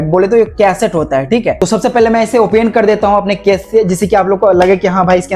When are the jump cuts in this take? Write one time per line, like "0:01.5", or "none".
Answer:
0:01.6

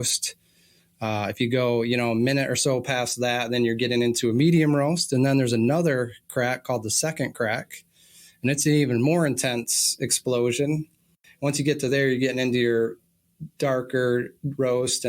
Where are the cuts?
0:11.2

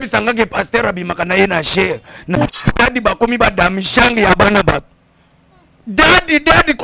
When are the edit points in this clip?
0:02.4

